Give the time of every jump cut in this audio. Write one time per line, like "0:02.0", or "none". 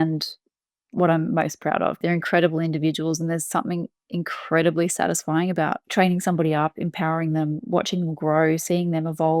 0:02.0